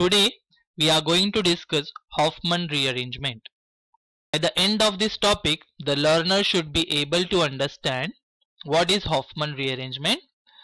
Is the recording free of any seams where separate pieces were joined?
no; 1 cut; at 4.3 s

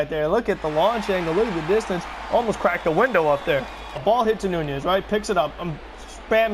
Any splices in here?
yes; 1 cut; at 4.0 s

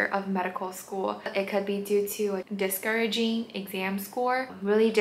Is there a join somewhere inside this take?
no; 0 cuts

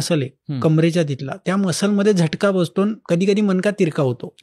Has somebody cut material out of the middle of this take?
yes; 2 cuts; at 1.4 s, 3.0 s

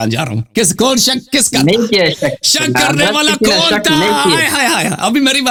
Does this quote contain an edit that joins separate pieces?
no; 0 cuts

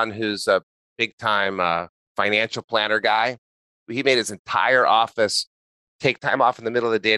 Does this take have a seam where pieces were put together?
yes; 2 cuts; at 2.0 s, 3.9 s

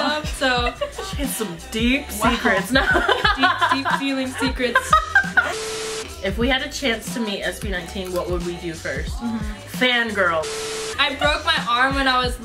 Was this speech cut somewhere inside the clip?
yes; 2 cuts; at 5.7 s, 10.7 s

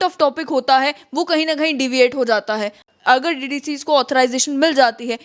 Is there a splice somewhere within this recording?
yes; 1 cut; at 2.8 s

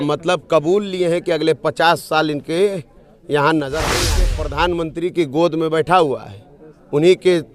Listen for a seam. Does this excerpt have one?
yes; 1 cut; at 4.1 s

